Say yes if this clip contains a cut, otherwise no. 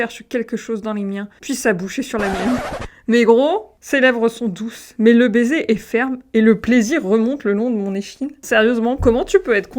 yes